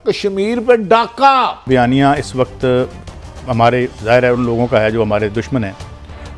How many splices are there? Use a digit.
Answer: 1